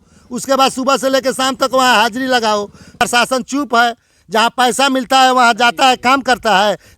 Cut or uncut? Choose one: cut